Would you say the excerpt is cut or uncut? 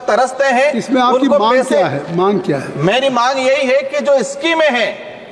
uncut